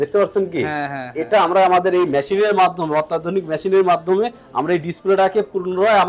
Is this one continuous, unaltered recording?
yes; 0 cuts

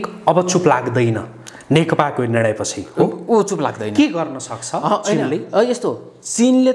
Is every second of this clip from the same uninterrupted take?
yes; 0 cuts

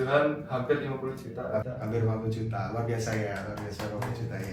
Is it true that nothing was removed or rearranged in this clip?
yes; 0 cuts

